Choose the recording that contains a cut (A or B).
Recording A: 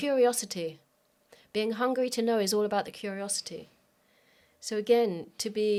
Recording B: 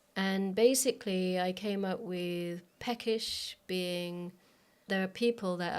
B